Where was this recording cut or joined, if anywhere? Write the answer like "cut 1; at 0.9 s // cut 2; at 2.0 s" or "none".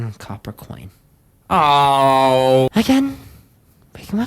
cut 1; at 2.7 s